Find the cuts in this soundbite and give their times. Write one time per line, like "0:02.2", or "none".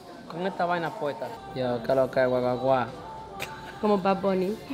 0:01.5